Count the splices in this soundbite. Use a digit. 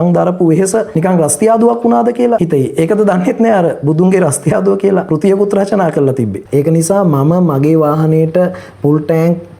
4